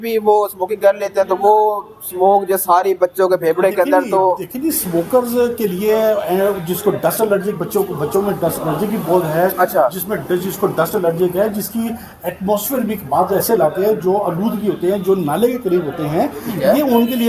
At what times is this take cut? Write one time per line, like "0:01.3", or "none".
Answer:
none

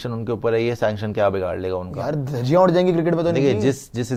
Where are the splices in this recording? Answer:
none

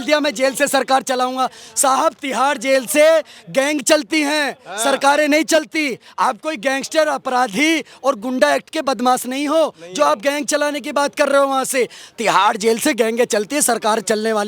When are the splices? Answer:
none

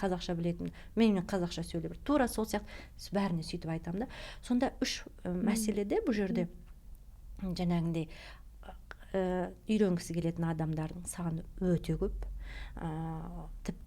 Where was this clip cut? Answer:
none

